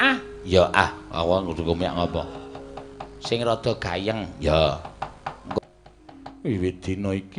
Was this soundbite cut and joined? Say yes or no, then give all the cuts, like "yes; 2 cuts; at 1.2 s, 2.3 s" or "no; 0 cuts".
yes; 1 cut; at 5.6 s